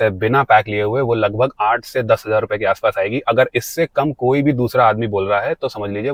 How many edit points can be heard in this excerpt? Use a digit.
0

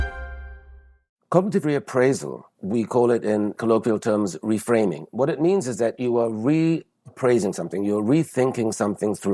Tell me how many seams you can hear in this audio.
1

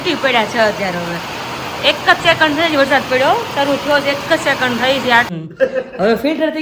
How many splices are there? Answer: 1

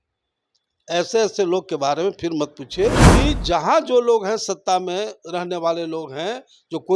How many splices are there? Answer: 1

